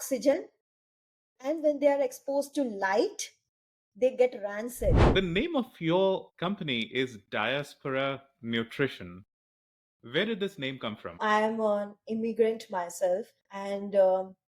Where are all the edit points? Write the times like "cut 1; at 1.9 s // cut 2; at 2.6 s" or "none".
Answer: cut 1; at 5.1 s // cut 2; at 6.3 s // cut 3; at 11.2 s